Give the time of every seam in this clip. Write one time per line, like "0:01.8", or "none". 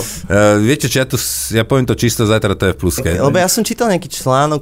0:03.3

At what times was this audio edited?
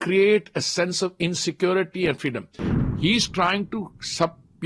0:02.6

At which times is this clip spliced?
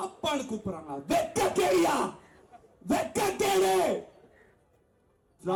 none

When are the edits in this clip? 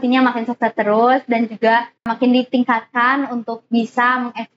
0:02.1

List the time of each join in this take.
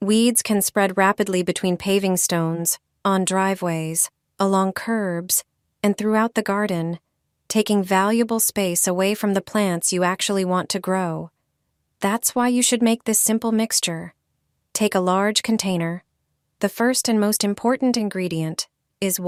none

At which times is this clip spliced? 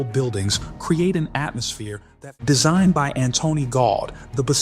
0:02.0

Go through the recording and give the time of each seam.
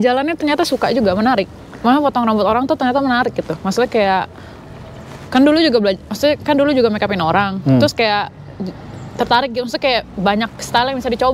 none

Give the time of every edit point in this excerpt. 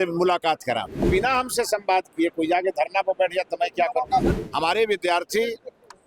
0:01.0
0:04.4

